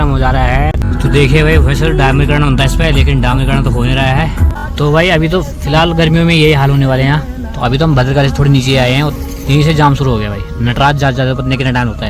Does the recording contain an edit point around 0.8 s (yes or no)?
yes